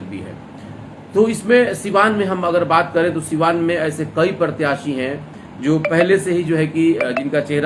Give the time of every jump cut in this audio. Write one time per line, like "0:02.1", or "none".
none